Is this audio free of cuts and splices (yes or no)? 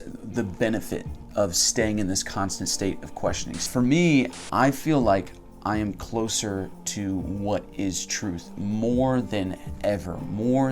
no